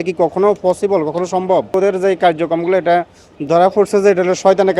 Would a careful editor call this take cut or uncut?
cut